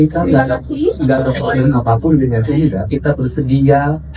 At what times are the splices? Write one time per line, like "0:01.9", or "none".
none